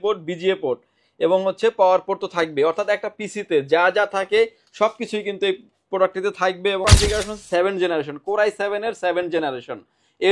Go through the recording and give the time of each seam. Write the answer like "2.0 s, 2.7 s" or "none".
6.8 s